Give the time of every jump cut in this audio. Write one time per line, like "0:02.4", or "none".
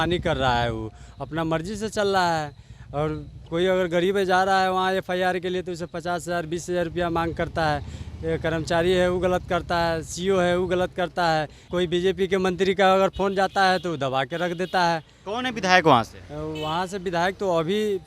0:11.6